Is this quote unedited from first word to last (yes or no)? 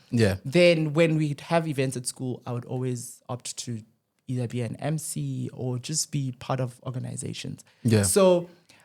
yes